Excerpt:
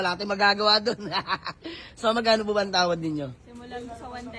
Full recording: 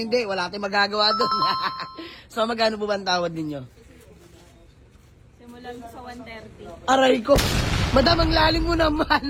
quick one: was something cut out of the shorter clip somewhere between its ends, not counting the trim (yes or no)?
yes